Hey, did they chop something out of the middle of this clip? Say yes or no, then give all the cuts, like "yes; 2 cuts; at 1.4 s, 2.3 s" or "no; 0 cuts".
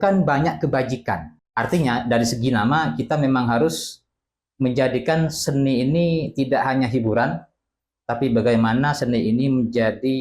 yes; 1 cut; at 1.4 s